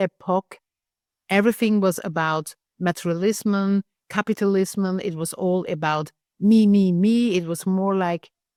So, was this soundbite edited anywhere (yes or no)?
no